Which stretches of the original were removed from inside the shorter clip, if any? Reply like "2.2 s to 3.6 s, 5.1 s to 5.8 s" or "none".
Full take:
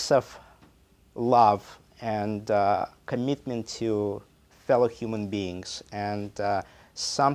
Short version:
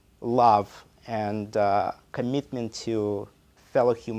none